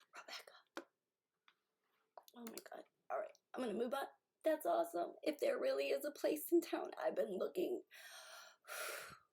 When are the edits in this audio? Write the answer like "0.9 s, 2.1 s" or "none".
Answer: none